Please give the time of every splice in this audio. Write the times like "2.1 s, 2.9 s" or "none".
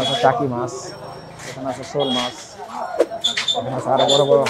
none